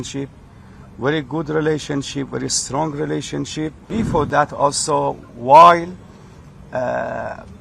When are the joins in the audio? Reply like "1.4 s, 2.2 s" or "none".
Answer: 3.9 s